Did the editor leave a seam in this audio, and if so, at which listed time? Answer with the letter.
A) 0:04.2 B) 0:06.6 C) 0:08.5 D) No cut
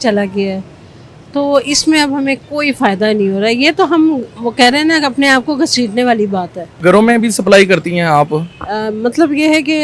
B